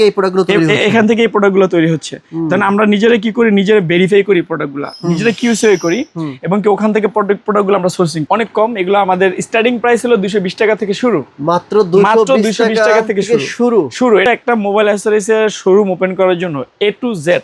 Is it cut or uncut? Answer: cut